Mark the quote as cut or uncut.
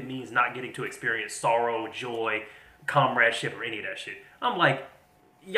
uncut